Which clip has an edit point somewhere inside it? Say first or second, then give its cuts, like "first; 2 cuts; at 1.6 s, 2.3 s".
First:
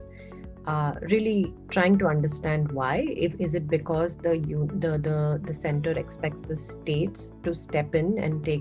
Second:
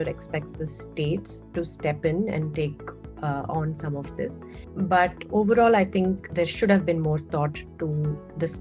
second; 2 cuts; at 4.6 s, 6.3 s